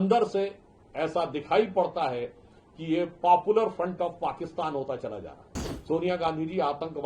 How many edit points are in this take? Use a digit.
1